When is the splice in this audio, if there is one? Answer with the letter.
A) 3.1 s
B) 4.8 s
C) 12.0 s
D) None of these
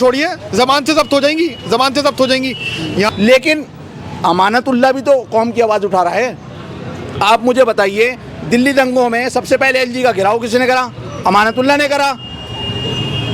A